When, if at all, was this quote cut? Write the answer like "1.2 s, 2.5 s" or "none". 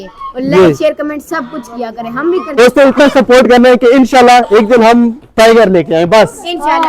2.6 s